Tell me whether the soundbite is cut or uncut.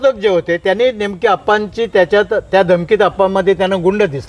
uncut